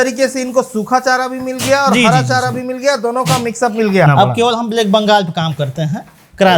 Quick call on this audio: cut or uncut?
cut